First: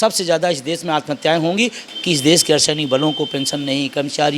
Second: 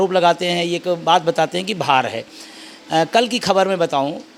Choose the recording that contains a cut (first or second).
first